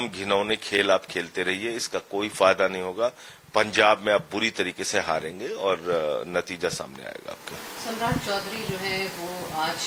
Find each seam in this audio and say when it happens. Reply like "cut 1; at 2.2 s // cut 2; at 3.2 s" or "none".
none